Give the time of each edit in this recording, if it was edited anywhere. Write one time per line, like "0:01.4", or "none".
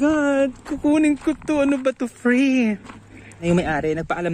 0:03.4